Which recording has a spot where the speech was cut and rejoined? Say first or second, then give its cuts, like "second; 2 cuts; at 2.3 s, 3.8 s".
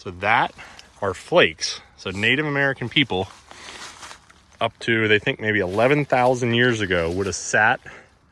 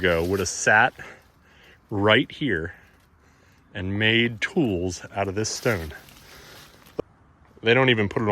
second; 1 cut; at 7.0 s